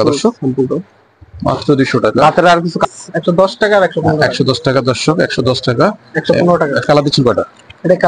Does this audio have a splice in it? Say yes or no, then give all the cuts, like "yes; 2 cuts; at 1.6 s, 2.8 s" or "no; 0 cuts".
yes; 2 cuts; at 2.8 s, 6.9 s